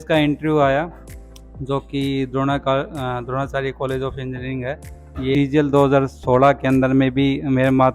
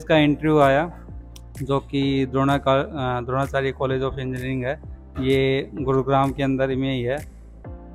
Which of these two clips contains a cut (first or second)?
first